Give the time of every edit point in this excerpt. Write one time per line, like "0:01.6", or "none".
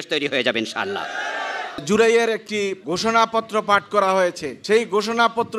0:01.8
0:02.8
0:04.5